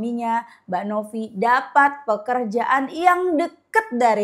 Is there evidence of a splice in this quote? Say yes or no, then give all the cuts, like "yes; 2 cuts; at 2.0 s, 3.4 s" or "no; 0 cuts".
no; 0 cuts